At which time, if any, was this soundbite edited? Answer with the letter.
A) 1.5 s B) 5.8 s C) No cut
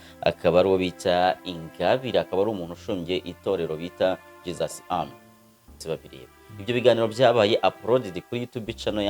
B